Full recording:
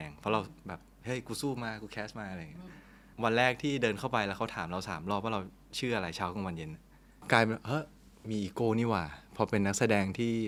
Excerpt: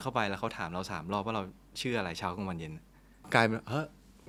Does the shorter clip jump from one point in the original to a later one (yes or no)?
no